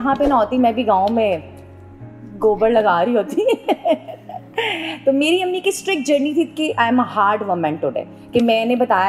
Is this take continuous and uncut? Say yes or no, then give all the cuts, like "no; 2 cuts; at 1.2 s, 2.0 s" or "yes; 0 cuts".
yes; 0 cuts